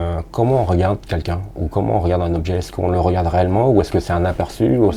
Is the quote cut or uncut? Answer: uncut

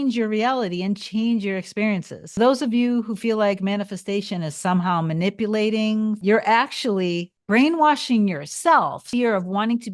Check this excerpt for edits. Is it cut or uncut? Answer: cut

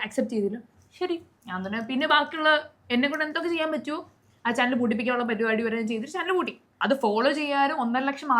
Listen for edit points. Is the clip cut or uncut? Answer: cut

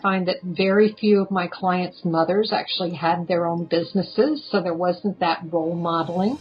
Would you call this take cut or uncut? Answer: uncut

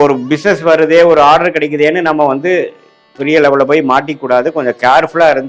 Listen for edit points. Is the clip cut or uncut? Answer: uncut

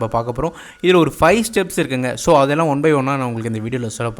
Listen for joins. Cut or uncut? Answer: uncut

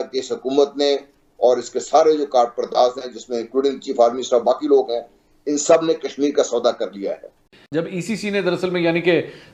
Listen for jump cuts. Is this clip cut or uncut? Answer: uncut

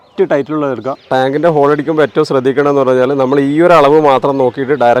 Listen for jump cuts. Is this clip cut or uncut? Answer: cut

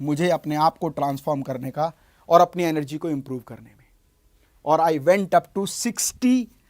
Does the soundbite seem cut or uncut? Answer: uncut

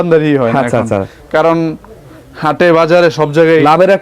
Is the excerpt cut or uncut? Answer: uncut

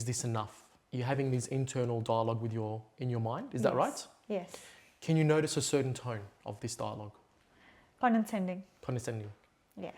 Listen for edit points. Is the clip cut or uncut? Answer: uncut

